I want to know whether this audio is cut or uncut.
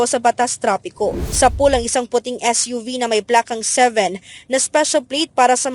cut